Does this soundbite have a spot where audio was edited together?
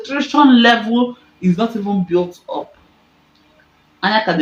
no; 0 cuts

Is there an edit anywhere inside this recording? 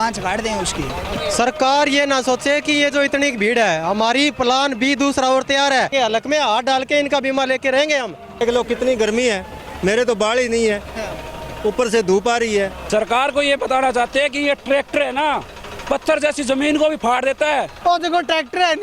yes; 5 cuts; at 1.1 s, 5.9 s, 8.4 s, 12.8 s, 17.7 s

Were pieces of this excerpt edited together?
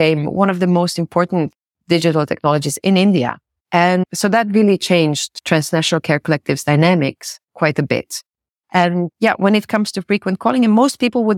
yes; 3 cuts; at 1.6 s, 4.0 s, 5.3 s

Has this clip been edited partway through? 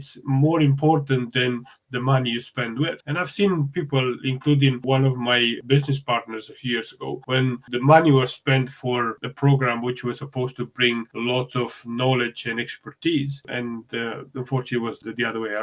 no; 0 cuts

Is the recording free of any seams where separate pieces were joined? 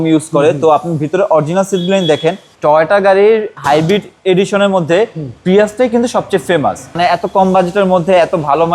no; 2 cuts; at 2.5 s, 7.0 s

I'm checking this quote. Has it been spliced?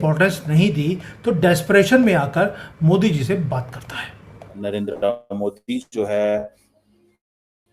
yes; 1 cut; at 4.6 s

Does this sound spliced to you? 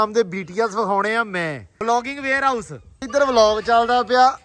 yes; 2 cuts; at 1.7 s, 3.1 s

